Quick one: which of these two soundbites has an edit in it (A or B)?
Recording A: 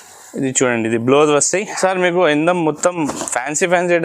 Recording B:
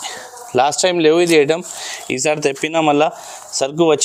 A